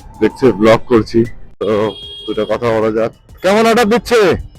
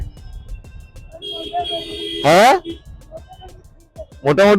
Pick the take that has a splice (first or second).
first